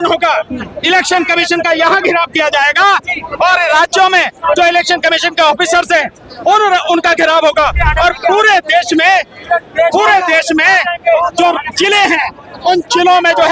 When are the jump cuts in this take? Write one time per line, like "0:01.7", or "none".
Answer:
none